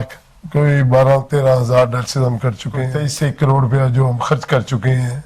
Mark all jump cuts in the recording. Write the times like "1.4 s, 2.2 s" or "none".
3.0 s